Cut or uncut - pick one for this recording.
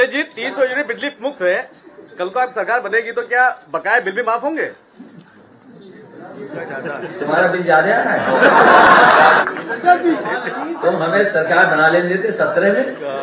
cut